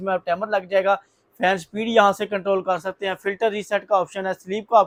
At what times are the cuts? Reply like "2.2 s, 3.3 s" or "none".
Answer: none